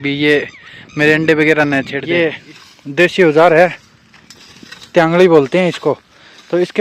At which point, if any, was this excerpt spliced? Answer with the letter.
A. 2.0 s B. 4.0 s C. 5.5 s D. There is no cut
A